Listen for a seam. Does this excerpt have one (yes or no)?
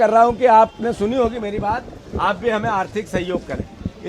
no